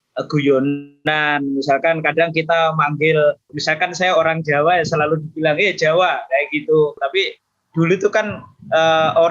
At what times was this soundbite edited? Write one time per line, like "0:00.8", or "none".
0:03.5
0:07.0